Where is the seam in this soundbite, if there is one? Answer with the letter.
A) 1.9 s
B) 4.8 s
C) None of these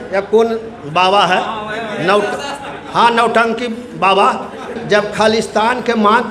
B